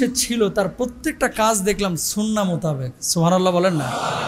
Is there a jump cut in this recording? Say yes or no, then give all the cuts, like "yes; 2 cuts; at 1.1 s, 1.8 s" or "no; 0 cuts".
no; 0 cuts